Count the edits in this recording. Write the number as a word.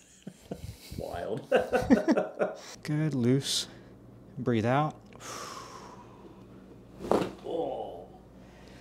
one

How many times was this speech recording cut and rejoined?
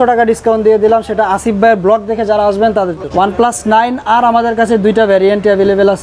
one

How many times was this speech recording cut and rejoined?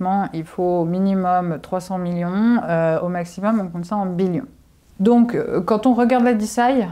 zero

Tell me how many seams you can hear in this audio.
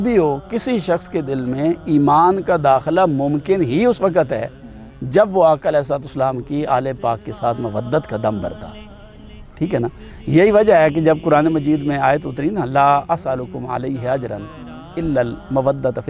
zero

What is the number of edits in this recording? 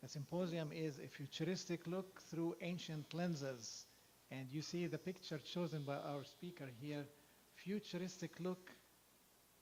zero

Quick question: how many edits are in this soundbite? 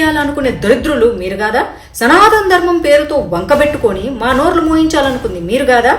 zero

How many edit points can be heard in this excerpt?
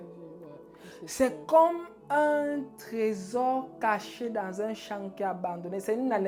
zero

